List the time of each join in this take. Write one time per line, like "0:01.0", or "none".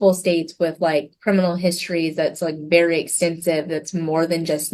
none